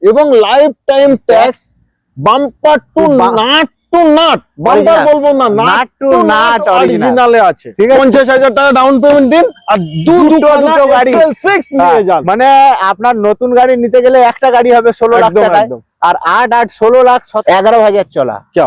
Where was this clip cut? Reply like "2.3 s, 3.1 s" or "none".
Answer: 8.0 s, 17.3 s

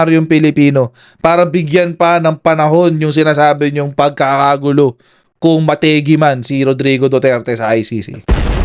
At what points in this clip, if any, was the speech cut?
none

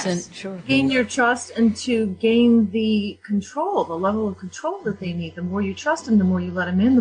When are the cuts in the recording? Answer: 5.2 s

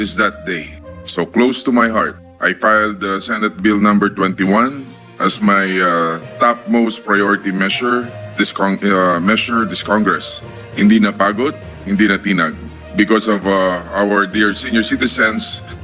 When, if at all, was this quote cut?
none

